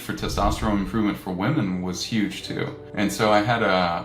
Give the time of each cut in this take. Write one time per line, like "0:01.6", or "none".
0:02.8

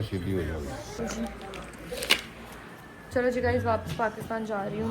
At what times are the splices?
0:01.0

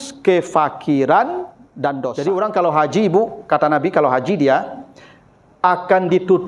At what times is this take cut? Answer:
0:02.1

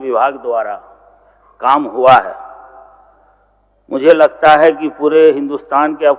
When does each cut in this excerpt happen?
none

